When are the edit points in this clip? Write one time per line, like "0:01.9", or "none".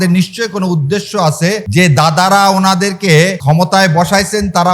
0:01.6
0:03.4